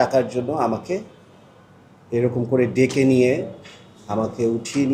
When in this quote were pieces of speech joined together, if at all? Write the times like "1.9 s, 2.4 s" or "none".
none